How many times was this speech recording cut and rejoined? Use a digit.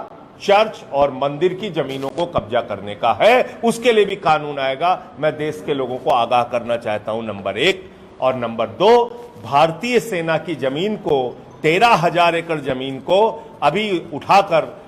0